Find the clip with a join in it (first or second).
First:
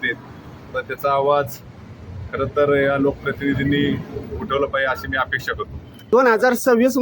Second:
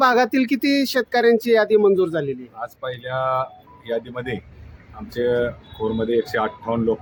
first